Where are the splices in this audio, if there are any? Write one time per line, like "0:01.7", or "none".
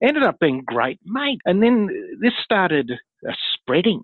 0:01.3